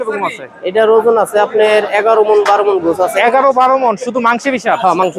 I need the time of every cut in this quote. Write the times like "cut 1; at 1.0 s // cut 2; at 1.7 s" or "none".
none